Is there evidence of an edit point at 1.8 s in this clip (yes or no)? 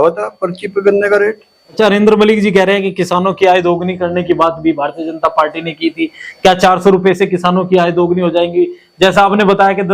yes